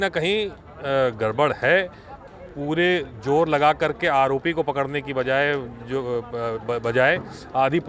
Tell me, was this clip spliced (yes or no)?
no